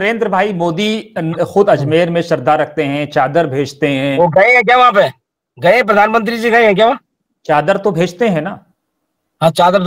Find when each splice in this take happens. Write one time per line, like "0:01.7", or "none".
none